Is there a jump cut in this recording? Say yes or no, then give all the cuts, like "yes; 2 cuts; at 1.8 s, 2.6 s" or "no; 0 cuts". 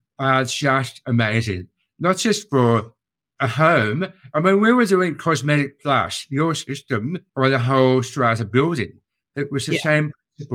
no; 0 cuts